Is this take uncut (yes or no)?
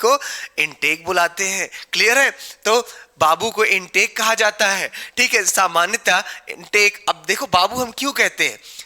yes